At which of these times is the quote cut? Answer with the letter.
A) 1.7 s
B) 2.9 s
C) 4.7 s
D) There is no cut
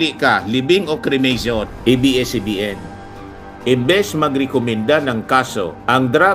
A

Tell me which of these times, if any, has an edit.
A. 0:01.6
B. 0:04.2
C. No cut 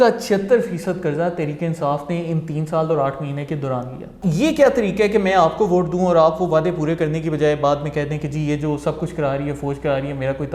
B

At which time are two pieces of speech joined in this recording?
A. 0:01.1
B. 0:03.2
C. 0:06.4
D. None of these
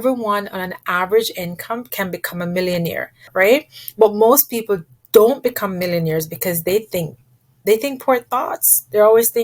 B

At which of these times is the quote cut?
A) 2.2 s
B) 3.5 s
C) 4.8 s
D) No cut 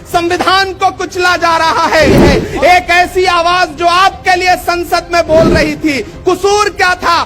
A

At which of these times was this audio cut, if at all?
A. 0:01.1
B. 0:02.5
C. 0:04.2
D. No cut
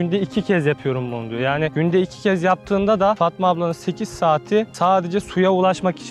D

